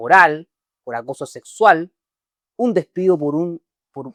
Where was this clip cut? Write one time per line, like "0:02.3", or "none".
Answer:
none